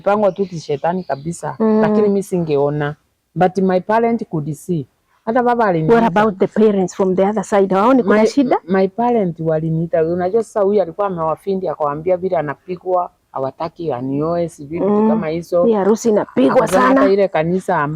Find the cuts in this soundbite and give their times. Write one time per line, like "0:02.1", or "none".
none

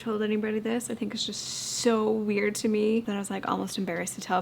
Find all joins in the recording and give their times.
0:03.1

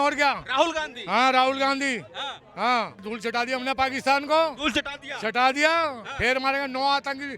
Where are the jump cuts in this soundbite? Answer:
0:03.0

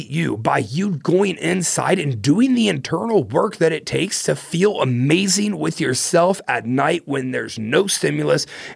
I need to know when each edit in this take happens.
none

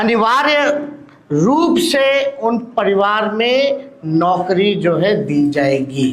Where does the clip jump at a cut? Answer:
none

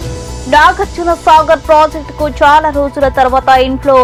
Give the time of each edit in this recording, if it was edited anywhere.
none

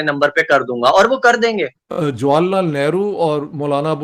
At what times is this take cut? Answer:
0:01.8

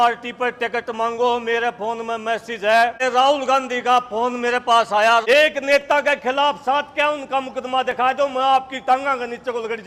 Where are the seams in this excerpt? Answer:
0:03.0
0:05.2

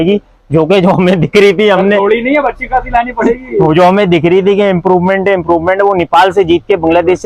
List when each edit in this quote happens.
none

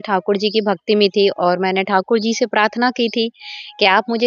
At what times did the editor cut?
none

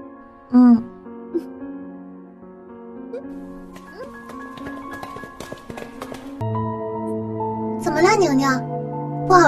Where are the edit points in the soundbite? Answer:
0:06.4

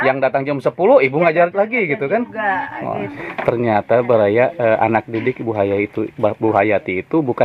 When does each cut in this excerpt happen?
0:03.1

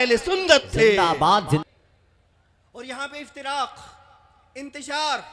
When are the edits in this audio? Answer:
0:01.6

